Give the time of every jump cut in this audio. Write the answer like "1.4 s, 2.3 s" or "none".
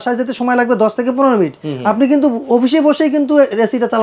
none